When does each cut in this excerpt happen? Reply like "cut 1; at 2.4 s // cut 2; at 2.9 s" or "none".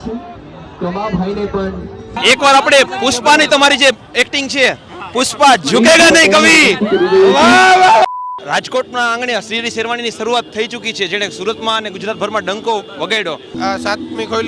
cut 1; at 2.1 s // cut 2; at 8.1 s // cut 3; at 13.5 s